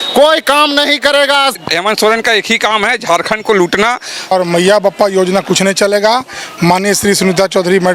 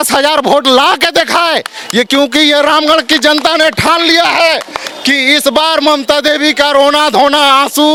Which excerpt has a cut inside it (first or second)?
first